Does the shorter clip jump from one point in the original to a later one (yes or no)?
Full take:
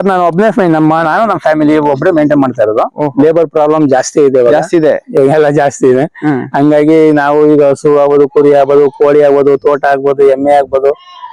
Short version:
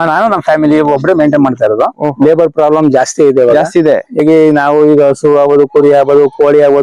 yes